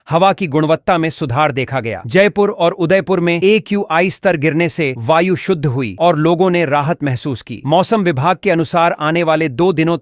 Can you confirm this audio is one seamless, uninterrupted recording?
yes; 0 cuts

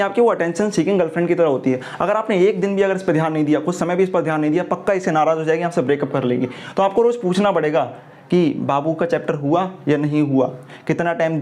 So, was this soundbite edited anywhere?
no; 0 cuts

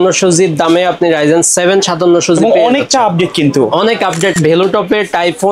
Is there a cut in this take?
yes; 1 cut; at 4.3 s

